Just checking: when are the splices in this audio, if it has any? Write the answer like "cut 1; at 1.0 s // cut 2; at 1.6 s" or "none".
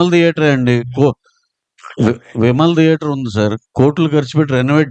none